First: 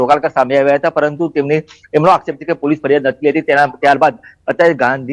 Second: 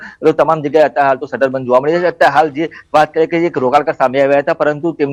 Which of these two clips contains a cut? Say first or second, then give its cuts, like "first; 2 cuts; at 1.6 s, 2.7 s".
first; 1 cut; at 2.8 s